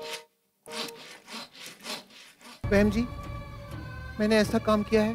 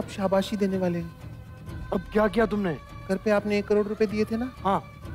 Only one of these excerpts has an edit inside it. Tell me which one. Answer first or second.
first